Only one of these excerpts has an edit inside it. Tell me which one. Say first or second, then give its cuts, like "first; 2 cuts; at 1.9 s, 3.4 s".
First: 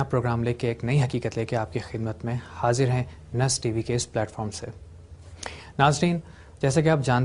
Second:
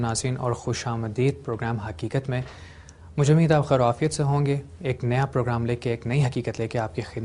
first; 1 cut; at 4.3 s